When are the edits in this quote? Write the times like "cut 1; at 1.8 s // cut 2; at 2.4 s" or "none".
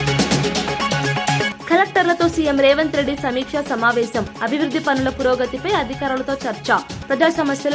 cut 1; at 1.5 s